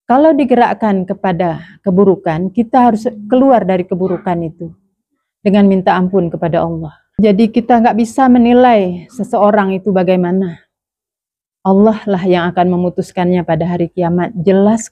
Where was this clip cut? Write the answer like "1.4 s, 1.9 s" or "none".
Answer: 7.0 s